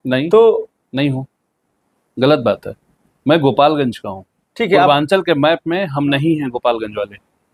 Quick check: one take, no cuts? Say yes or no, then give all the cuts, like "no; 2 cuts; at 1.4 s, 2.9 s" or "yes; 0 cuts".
yes; 0 cuts